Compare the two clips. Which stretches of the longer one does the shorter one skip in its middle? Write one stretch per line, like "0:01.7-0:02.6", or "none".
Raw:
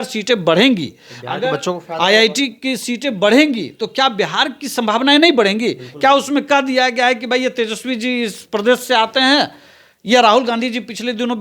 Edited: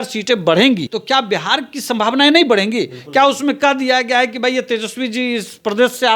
0:00.9-0:03.8